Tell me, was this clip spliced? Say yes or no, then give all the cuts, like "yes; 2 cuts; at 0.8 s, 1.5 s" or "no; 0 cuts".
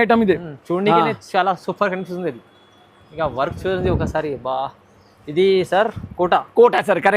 no; 0 cuts